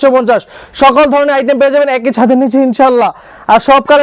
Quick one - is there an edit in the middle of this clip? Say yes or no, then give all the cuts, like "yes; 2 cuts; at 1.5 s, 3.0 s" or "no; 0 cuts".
no; 0 cuts